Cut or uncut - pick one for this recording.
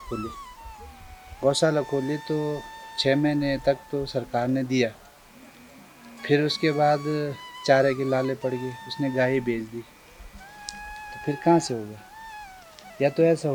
uncut